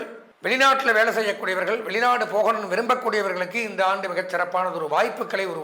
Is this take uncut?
yes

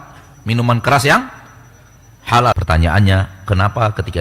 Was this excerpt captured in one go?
no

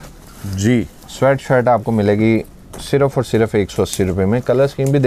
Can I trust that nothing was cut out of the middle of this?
yes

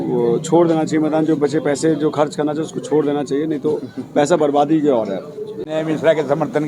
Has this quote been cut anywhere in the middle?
no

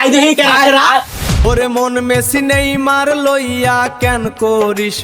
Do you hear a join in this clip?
yes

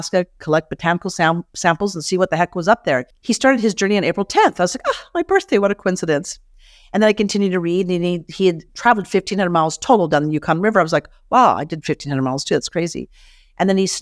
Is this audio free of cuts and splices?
no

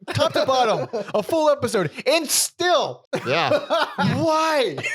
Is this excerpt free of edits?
no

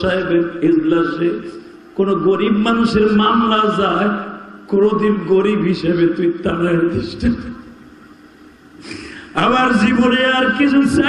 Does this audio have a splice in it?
no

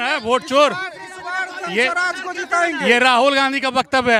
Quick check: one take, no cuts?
yes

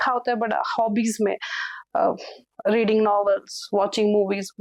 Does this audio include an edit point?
no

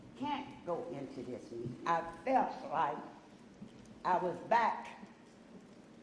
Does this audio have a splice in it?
yes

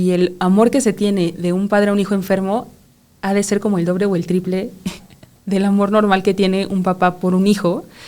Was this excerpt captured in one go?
yes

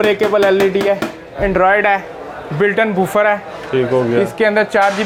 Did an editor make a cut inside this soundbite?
no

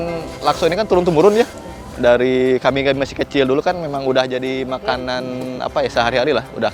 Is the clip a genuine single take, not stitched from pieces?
yes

